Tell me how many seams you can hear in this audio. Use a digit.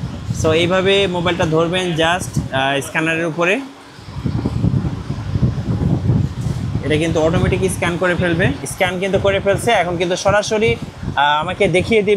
1